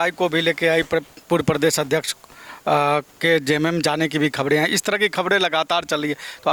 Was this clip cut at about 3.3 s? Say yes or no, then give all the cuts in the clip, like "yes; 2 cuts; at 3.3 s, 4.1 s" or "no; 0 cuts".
no; 0 cuts